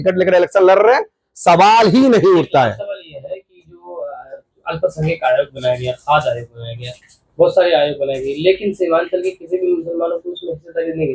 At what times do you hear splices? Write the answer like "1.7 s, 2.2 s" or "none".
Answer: none